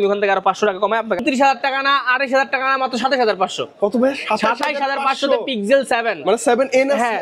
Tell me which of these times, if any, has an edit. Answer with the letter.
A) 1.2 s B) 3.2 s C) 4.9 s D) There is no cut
A